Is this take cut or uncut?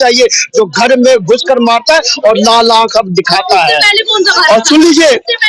uncut